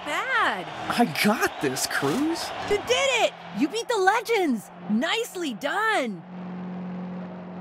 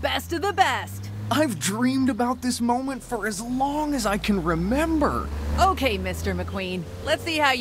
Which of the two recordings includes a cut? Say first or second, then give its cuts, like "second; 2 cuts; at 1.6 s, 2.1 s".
first; 1 cut; at 2.7 s